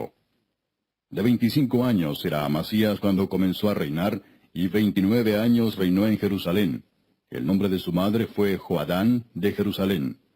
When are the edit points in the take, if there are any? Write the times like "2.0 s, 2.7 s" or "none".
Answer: 7.9 s